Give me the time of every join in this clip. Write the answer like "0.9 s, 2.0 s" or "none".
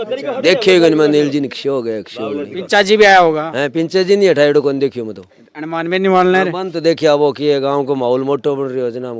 none